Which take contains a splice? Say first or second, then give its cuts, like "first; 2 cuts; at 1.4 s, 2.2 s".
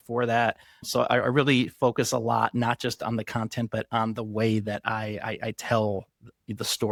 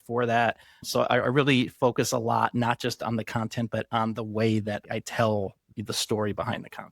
second; 2 cuts; at 4.8 s, 5.7 s